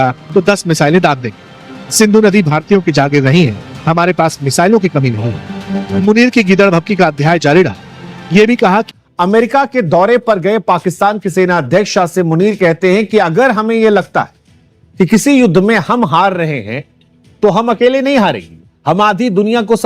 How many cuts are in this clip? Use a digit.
1